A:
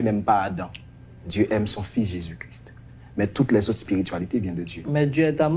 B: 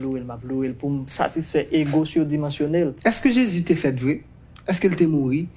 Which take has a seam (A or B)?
B